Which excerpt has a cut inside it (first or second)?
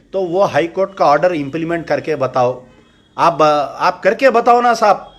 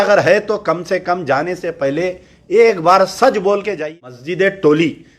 second